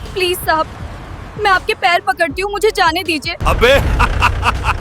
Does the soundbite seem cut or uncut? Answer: cut